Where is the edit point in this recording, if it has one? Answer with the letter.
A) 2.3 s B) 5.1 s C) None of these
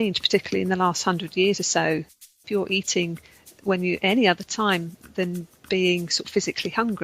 A